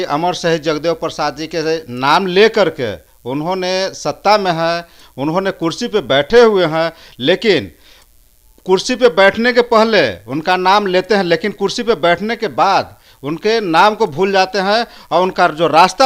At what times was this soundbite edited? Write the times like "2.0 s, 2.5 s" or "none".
none